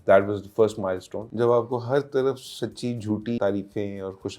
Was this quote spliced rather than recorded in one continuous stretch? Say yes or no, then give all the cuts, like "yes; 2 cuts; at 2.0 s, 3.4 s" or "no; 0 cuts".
yes; 2 cuts; at 1.2 s, 3.4 s